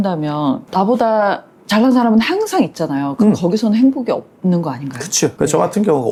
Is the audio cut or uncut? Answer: uncut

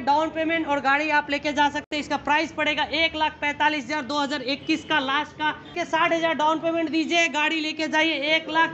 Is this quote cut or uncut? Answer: uncut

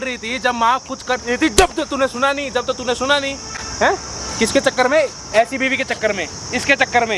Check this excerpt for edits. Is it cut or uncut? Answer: uncut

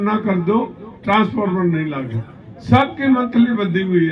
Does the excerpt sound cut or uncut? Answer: uncut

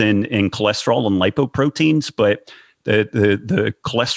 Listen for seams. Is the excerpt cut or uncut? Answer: uncut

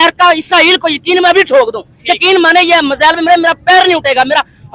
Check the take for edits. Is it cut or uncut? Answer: uncut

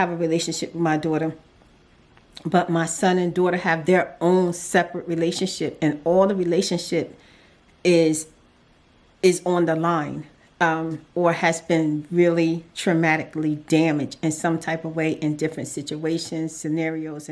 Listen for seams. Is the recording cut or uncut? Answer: uncut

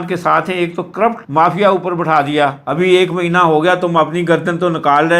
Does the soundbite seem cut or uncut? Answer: cut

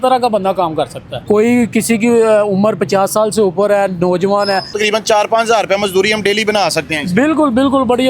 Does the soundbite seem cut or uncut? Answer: cut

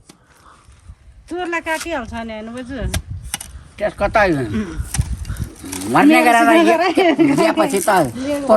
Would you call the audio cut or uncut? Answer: uncut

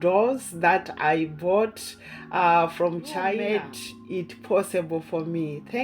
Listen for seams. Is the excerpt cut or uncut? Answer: cut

